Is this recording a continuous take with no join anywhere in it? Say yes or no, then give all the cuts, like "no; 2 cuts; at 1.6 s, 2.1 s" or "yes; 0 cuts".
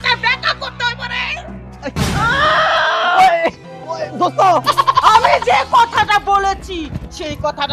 no; 2 cuts; at 1.8 s, 5.1 s